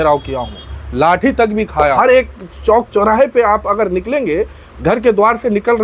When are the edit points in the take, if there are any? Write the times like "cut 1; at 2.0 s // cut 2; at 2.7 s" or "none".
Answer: cut 1; at 2.0 s